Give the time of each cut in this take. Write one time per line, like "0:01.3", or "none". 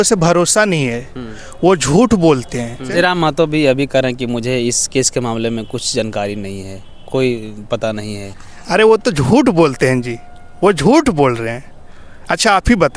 0:02.9